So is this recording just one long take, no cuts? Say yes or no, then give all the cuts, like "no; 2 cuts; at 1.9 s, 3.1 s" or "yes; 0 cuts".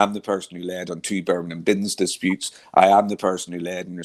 yes; 0 cuts